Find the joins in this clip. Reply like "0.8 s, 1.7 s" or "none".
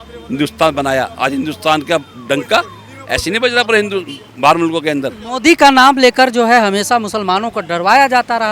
none